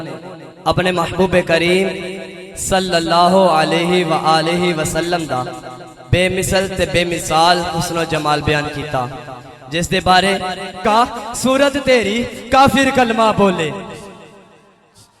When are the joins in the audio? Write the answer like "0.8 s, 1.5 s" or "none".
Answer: 10.8 s